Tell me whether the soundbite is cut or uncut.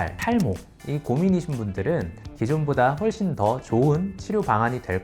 cut